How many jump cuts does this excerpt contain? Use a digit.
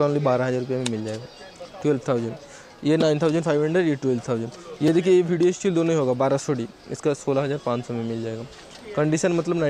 0